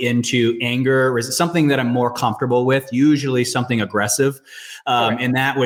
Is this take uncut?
yes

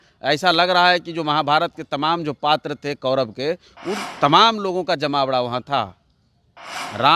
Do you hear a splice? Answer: no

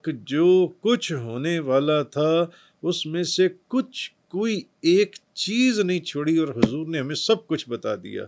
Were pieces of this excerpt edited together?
no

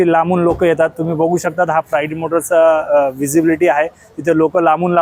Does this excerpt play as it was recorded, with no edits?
yes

